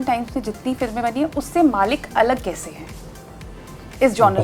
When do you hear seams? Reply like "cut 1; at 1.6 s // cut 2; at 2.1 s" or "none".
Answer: none

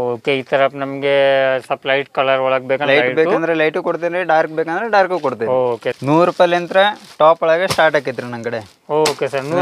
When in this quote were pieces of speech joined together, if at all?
cut 1; at 6.0 s

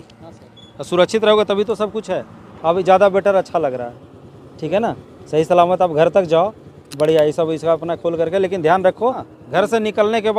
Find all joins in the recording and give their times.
none

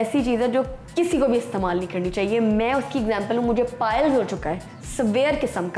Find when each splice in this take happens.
none

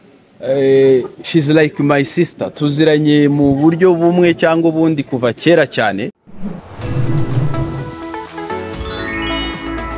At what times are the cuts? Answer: cut 1; at 6.3 s

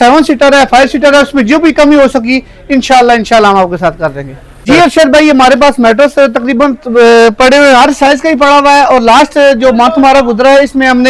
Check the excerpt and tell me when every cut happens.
cut 1; at 4.6 s

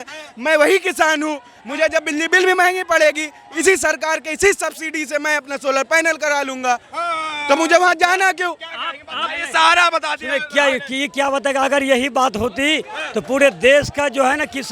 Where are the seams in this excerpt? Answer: none

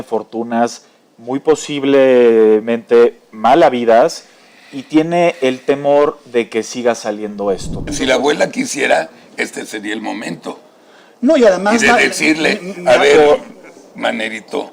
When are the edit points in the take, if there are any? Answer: cut 1; at 7.9 s

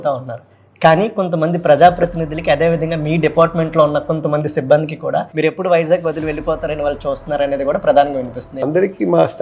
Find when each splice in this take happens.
cut 1; at 5.3 s // cut 2; at 8.6 s

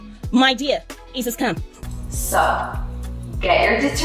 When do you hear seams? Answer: cut 1; at 1.7 s

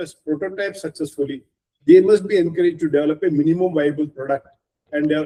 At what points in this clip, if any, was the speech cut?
none

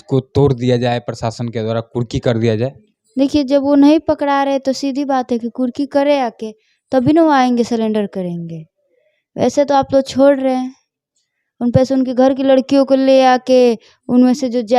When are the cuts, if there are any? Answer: none

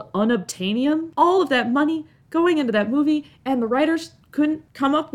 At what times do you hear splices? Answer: cut 1; at 1.1 s

